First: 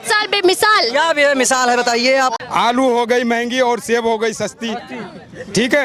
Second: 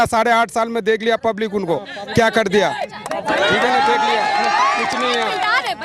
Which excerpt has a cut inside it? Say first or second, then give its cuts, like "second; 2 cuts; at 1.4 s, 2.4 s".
first; 1 cut; at 2.4 s